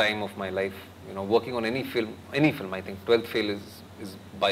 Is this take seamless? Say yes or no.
yes